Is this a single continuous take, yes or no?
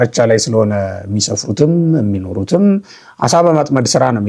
yes